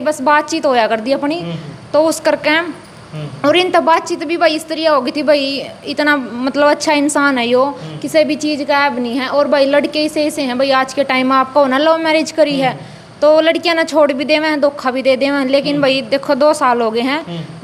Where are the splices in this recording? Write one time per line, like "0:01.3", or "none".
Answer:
none